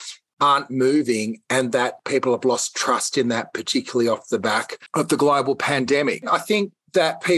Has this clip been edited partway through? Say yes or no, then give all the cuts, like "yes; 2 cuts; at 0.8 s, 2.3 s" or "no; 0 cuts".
yes; 3 cuts; at 2.0 s, 4.8 s, 6.3 s